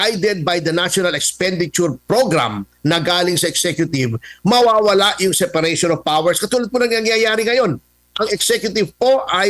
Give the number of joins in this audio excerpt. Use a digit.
0